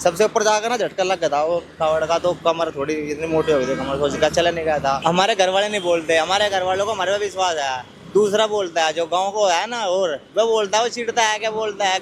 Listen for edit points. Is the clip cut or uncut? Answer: cut